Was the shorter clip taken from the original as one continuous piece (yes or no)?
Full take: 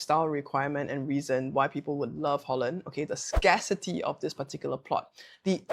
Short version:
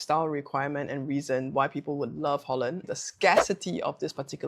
no